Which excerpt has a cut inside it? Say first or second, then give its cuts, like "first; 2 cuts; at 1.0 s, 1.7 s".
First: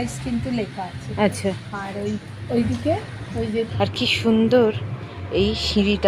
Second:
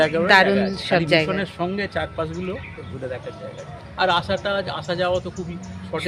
first; 1 cut; at 3.7 s